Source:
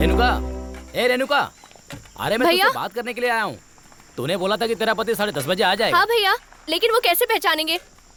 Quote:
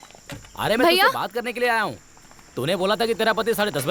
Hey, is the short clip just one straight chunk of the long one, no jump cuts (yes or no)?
yes